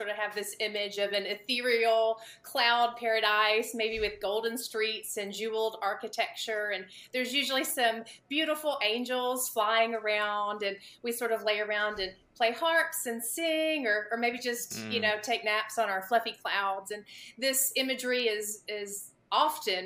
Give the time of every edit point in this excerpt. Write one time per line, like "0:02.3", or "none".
none